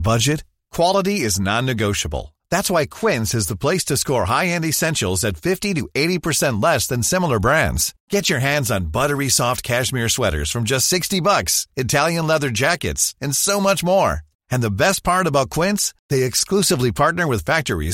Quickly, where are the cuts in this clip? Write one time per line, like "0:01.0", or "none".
none